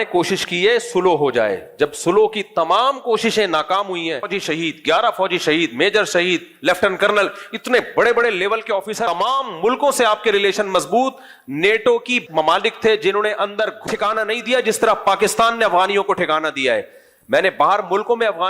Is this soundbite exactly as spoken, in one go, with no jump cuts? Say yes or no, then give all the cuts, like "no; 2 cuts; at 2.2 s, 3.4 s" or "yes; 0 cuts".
no; 3 cuts; at 4.4 s, 9.0 s, 13.8 s